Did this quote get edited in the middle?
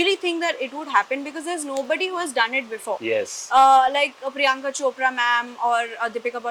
no; 0 cuts

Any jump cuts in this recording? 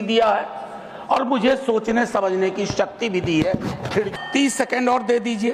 yes; 1 cut; at 4.1 s

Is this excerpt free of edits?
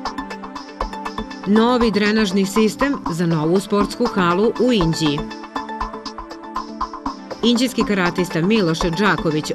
yes; 0 cuts

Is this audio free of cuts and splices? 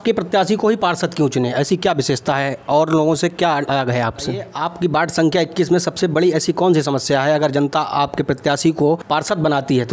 no; 2 cuts; at 4.6 s, 9.0 s

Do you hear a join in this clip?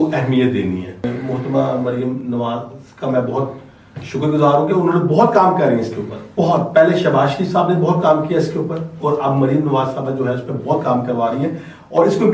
yes; 2 cuts; at 1.0 s, 6.2 s

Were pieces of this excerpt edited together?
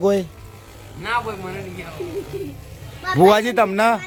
no; 0 cuts

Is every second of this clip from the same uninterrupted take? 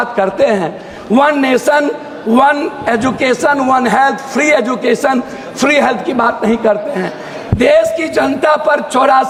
yes; 0 cuts

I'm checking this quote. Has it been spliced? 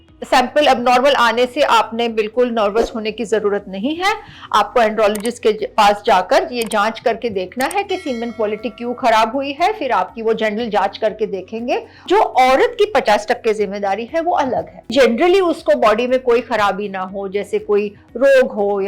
yes; 2 cuts; at 12.0 s, 14.9 s

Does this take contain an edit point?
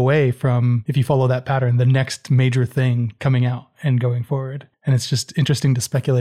yes; 3 cuts; at 0.8 s, 3.1 s, 4.6 s

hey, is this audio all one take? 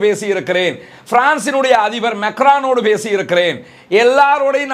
yes; 0 cuts

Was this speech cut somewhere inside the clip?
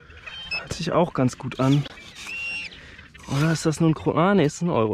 no; 0 cuts

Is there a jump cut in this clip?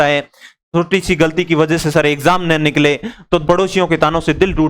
yes; 1 cut; at 3.4 s

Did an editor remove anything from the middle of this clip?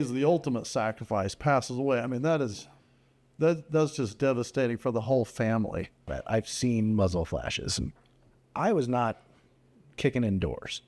yes; 1 cut; at 6.2 s

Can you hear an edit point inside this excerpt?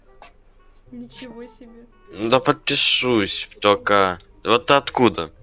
yes; 1 cut; at 1.9 s

